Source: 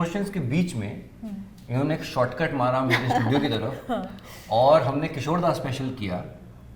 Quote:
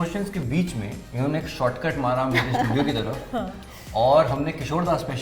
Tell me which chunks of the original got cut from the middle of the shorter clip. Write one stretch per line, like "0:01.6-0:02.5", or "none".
0:01.0-0:01.6

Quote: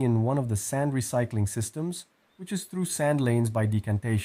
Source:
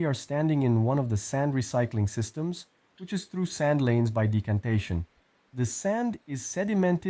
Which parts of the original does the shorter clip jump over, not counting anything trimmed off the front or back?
none

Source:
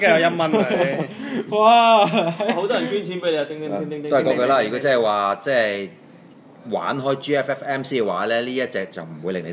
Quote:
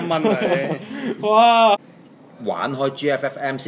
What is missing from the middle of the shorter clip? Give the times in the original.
0:02.1-0:06.1

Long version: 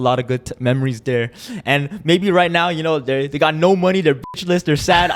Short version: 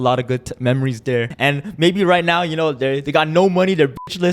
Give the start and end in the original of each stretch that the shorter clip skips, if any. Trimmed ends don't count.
0:01.3-0:01.6

